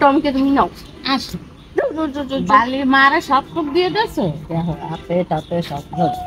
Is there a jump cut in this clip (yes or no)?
no